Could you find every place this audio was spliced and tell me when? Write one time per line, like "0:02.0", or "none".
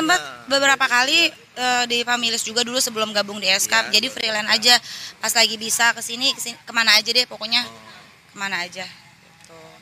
none